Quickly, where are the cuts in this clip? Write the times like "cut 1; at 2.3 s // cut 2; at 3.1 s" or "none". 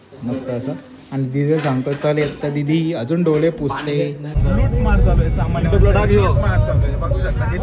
cut 1; at 4.3 s